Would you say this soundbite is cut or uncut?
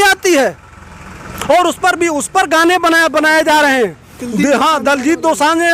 uncut